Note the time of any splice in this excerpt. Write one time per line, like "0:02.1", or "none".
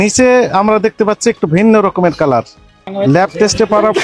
0:02.9